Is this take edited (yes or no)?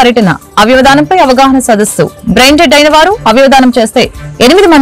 no